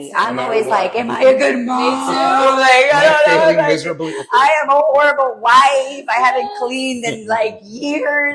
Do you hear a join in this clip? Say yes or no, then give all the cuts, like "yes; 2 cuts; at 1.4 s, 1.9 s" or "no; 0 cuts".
no; 0 cuts